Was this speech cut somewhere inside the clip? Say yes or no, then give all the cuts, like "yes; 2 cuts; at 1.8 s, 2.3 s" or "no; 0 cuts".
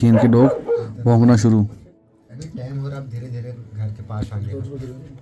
yes; 1 cut; at 2.0 s